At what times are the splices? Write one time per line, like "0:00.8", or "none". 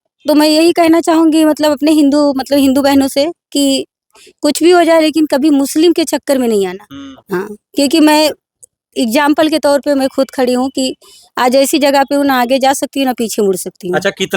none